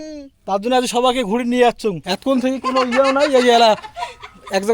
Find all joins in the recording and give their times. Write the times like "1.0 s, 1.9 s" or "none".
2.1 s